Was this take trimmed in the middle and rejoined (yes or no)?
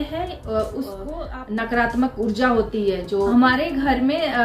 yes